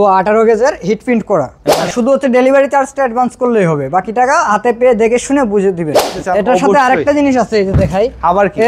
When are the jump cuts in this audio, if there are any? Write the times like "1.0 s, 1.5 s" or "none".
1.9 s, 6.1 s